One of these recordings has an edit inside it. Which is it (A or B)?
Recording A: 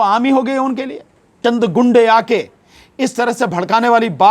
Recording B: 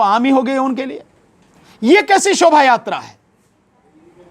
A